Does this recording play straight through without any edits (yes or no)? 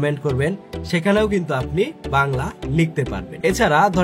no